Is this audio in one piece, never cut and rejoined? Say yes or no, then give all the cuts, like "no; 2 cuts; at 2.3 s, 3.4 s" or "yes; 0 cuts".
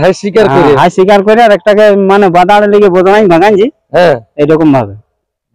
yes; 0 cuts